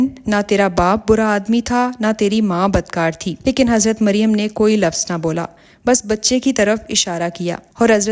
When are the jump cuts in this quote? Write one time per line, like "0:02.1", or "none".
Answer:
none